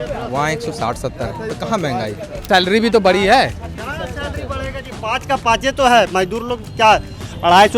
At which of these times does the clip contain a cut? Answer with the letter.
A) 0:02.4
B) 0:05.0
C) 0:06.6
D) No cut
A